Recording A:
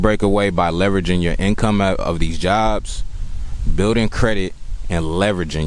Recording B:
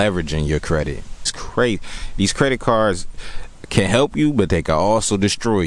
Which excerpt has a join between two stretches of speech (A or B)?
B